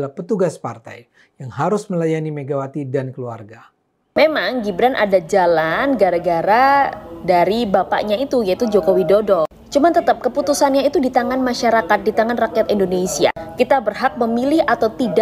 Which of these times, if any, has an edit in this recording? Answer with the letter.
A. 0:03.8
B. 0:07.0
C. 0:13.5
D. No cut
A